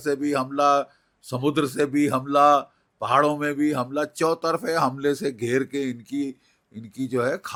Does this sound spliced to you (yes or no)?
no